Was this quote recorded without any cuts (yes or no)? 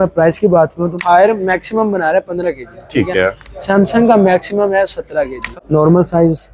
no